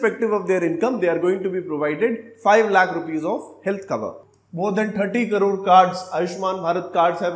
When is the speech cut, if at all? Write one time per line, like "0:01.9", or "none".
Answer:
0:04.2

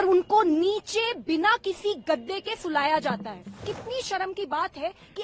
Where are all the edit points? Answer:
0:03.7

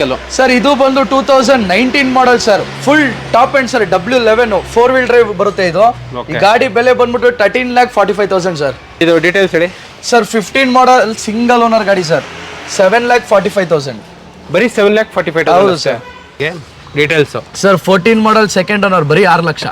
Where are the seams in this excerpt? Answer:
0:09.0
0:16.5

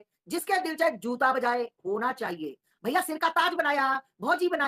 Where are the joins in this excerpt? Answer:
0:02.7

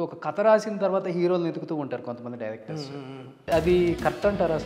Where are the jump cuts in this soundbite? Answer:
0:03.5

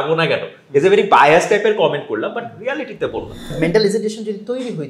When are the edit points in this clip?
0:03.6

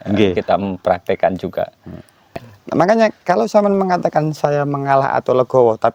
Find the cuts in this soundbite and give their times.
0:02.5

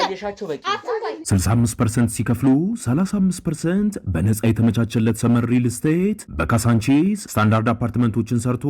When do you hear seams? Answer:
0:01.2

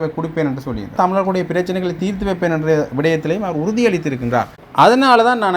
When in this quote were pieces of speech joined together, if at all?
0:00.9

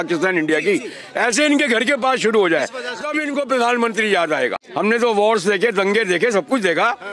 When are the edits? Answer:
0:04.6

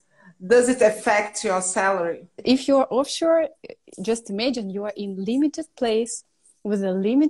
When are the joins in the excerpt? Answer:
0:02.4

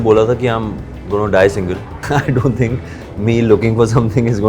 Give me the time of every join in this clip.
0:01.9

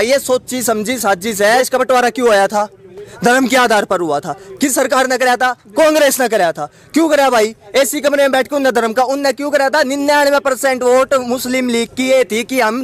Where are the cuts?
0:01.6

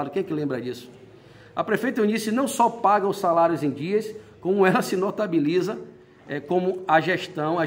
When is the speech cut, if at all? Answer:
none

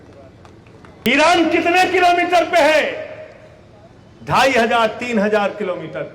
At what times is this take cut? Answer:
0:01.1

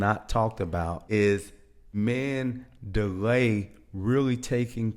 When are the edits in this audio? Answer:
0:01.0
0:01.9

